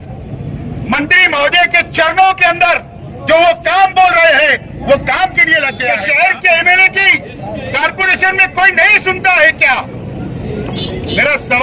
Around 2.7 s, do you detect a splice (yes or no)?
no